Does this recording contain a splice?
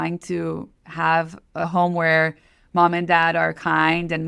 no; 0 cuts

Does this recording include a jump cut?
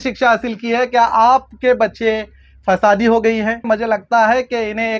yes; 1 cut; at 3.6 s

